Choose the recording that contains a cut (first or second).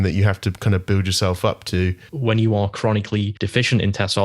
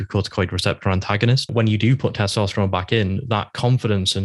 first